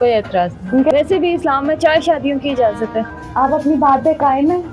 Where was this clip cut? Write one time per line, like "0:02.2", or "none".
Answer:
0:00.9
0:03.1